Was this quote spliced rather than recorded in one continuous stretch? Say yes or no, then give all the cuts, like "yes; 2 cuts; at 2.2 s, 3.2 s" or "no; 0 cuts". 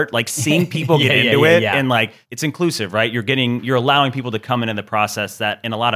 yes; 1 cut; at 2.2 s